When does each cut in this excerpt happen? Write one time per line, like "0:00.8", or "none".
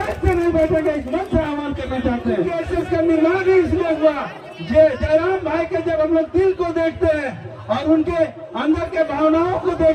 0:02.5